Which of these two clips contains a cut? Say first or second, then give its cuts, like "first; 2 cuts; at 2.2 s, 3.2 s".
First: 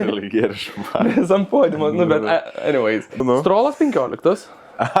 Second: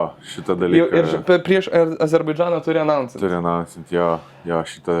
first; 1 cut; at 3.2 s